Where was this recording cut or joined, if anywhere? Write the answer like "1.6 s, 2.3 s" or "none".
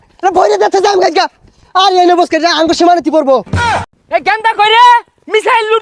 3.8 s